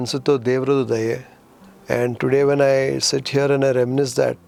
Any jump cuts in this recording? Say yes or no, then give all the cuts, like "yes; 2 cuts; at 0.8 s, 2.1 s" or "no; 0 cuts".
no; 0 cuts